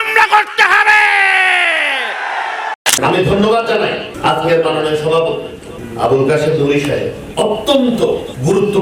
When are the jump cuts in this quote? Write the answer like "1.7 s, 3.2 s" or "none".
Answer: 2.8 s